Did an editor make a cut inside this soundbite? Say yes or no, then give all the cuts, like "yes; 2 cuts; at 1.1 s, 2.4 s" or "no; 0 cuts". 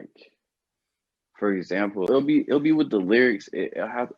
yes; 1 cut; at 2.1 s